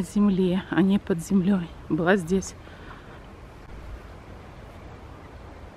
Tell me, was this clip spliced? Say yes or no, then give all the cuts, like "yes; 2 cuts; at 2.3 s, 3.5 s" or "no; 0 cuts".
no; 0 cuts